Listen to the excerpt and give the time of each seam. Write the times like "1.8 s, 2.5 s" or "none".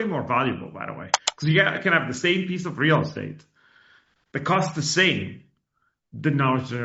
none